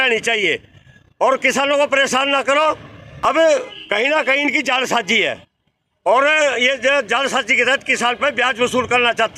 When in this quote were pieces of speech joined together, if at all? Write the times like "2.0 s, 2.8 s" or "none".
3.2 s